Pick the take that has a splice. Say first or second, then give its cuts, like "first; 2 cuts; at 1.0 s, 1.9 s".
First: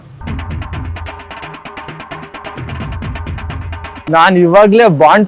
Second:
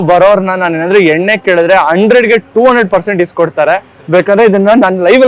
first; 1 cut; at 3.9 s